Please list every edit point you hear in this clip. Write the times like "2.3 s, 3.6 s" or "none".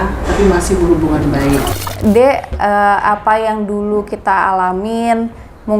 1.7 s